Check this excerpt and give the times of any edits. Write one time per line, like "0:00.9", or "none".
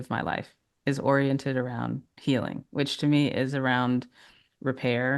0:02.1